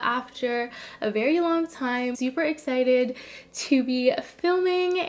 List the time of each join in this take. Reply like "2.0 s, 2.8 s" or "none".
2.1 s